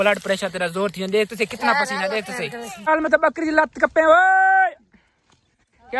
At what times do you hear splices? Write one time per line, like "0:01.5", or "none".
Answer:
0:02.7